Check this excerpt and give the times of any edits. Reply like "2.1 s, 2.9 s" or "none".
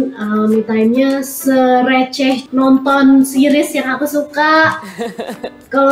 2.4 s